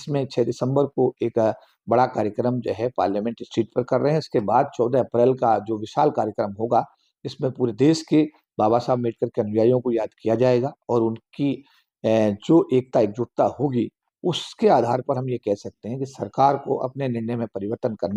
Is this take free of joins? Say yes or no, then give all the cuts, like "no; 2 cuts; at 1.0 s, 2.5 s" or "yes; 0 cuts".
yes; 0 cuts